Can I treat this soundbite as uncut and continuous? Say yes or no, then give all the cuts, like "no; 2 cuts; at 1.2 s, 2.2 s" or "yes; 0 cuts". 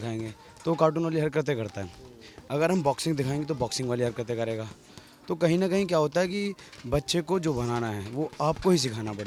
yes; 0 cuts